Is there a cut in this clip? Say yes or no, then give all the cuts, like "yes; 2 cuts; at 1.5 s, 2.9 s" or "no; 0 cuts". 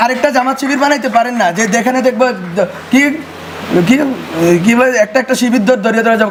no; 0 cuts